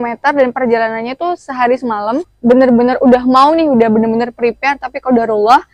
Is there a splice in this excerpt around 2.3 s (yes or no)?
yes